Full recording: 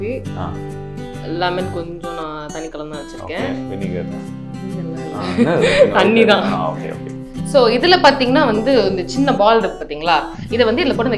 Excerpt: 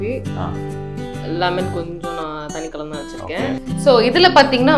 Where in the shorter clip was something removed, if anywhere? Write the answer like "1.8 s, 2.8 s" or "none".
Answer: 3.6 s